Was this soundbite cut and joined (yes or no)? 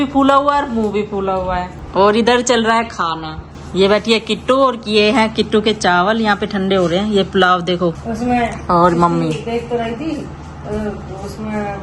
no